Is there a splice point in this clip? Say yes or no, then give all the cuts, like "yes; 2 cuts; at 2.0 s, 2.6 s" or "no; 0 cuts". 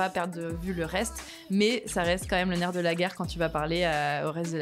no; 0 cuts